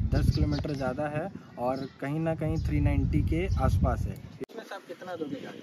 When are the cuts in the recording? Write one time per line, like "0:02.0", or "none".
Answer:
0:04.4